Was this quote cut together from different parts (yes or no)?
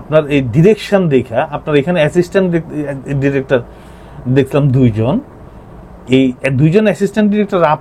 no